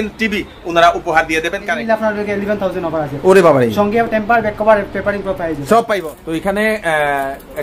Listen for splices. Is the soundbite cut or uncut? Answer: cut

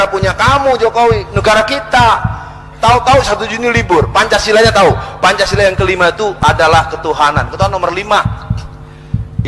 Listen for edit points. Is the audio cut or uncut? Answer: uncut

